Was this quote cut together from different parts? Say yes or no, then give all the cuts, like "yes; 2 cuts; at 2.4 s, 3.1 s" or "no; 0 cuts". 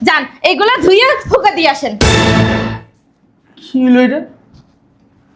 no; 0 cuts